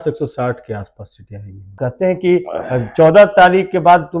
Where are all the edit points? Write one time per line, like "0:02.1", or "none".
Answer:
0:01.8